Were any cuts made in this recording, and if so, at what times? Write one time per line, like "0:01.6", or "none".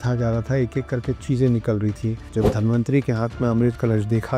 0:02.2